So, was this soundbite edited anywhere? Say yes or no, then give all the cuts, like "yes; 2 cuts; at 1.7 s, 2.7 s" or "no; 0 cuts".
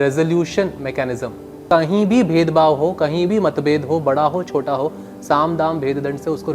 yes; 1 cut; at 1.6 s